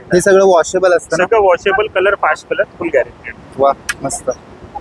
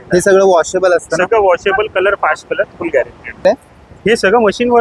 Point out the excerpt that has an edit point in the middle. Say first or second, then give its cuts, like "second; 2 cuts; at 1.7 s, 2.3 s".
second; 1 cut; at 3.4 s